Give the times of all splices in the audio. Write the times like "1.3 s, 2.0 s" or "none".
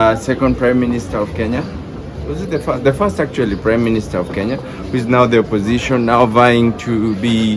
none